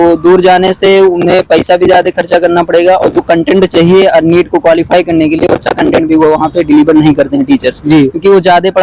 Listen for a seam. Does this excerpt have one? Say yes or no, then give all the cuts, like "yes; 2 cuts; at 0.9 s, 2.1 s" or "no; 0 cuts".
no; 0 cuts